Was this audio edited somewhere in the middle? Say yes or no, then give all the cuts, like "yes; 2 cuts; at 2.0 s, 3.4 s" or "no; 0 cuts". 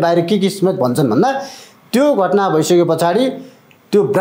no; 0 cuts